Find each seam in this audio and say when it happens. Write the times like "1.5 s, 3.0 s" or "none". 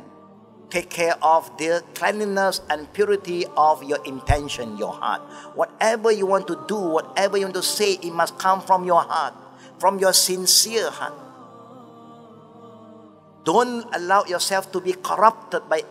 none